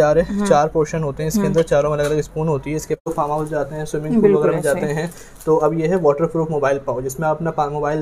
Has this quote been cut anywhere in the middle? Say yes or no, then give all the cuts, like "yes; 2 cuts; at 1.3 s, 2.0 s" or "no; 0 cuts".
yes; 1 cut; at 3.1 s